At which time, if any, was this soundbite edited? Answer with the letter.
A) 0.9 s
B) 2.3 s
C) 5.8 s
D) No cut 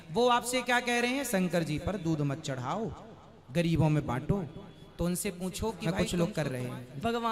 C